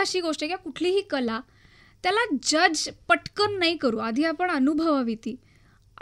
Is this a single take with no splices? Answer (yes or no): yes